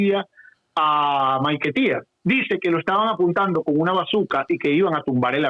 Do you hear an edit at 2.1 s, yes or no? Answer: yes